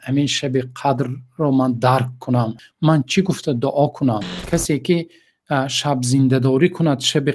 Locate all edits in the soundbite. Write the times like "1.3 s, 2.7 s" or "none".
2.6 s, 4.3 s